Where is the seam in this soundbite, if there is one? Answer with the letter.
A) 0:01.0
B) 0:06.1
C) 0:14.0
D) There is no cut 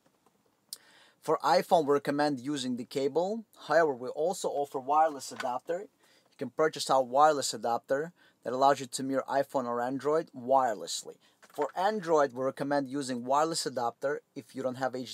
D